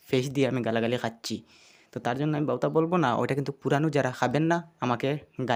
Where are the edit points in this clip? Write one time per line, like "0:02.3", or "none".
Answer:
none